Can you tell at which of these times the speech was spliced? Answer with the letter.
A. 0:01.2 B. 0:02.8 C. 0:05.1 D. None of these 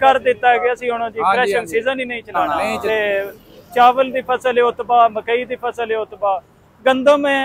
B